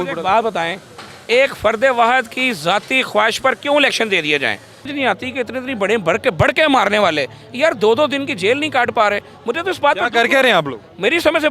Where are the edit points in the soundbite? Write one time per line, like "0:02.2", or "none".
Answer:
0:04.9